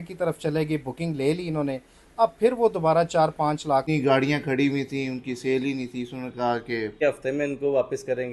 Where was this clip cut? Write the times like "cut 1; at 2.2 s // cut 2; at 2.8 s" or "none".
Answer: cut 1; at 3.9 s // cut 2; at 7.0 s